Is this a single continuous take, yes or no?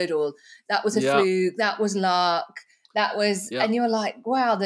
yes